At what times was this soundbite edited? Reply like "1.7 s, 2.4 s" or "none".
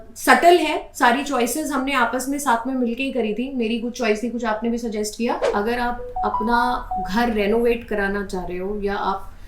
5.5 s